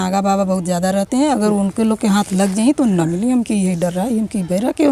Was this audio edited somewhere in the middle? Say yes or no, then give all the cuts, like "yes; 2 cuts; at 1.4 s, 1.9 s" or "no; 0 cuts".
no; 0 cuts